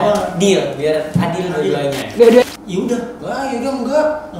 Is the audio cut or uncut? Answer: cut